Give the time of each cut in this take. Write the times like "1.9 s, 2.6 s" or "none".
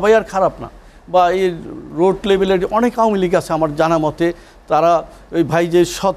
none